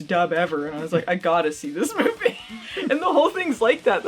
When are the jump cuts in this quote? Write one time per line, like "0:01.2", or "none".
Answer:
0:02.6